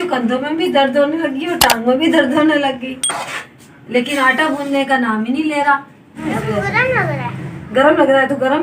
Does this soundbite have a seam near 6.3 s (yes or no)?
yes